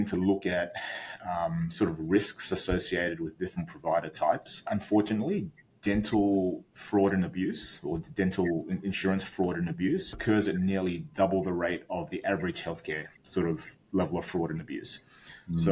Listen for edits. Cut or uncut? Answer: cut